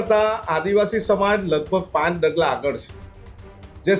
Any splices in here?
no; 0 cuts

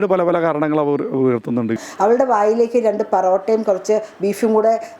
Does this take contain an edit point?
yes; 1 cut; at 1.8 s

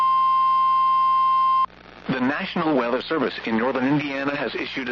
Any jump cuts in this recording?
yes; 1 cut; at 1.6 s

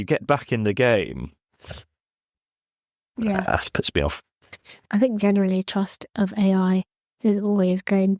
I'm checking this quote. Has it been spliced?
yes; 1 cut; at 4.9 s

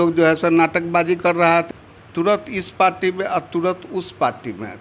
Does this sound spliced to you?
yes; 1 cut; at 1.7 s

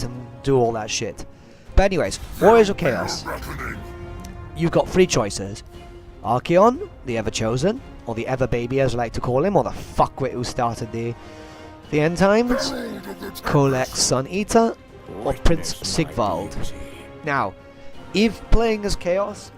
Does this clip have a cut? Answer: yes; 1 cut; at 1.1 s

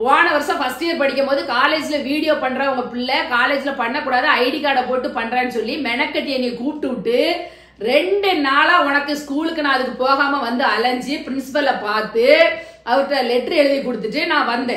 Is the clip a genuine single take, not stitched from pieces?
yes; 0 cuts

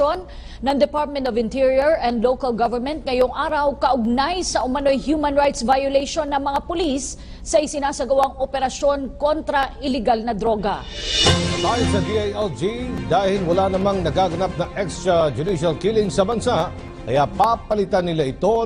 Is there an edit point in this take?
yes; 1 cut; at 13.4 s

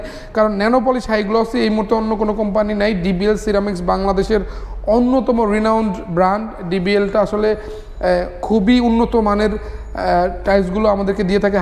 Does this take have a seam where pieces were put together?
no; 0 cuts

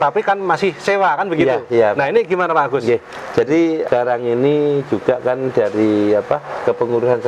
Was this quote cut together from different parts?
yes; 1 cut; at 3.9 s

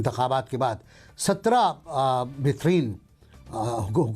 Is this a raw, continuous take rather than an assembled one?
yes; 0 cuts

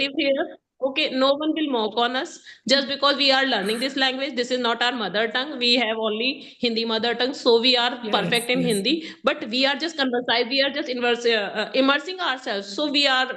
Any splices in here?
no; 0 cuts

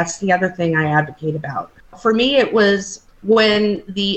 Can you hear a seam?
yes; 2 cuts; at 1.9 s, 2.9 s

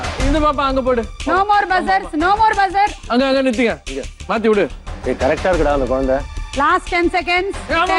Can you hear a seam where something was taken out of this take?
yes; 2 cuts; at 3.0 s, 4.9 s

